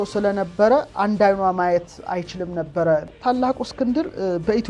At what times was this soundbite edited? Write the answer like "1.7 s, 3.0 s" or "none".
3.1 s